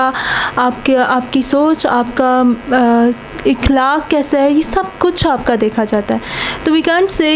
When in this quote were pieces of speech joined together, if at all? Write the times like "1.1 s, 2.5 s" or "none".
none

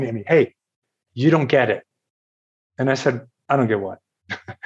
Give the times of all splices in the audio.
1.0 s

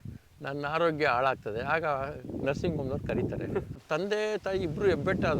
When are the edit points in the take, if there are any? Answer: 3.8 s

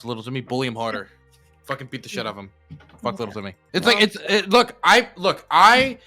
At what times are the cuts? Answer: 3.6 s

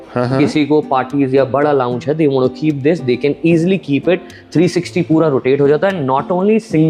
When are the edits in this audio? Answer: none

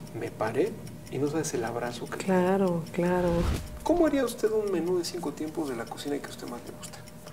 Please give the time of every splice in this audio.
3.6 s

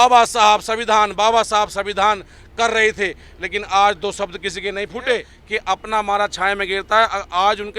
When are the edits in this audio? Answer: 5.4 s

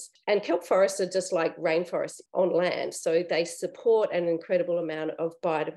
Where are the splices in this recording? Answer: 2.2 s

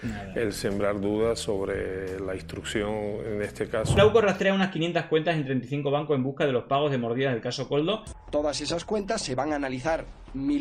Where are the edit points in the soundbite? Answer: 4.0 s, 8.1 s

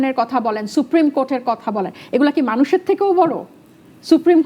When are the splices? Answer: none

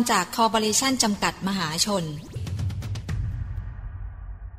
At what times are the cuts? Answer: 2.4 s

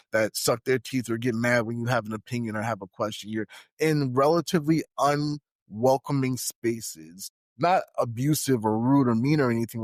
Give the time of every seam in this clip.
none

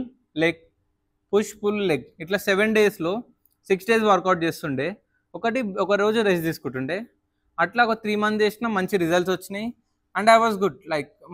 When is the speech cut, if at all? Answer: none

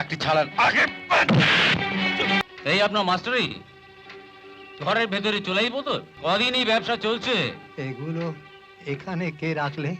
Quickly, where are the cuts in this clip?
2.4 s, 6.1 s

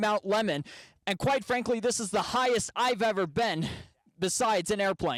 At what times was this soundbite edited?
none

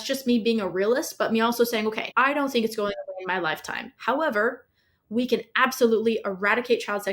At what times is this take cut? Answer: 2.0 s

